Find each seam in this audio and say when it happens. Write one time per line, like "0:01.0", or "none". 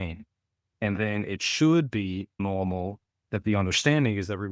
0:02.4